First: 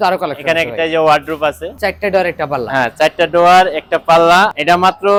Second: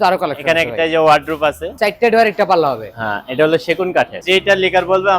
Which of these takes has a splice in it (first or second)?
second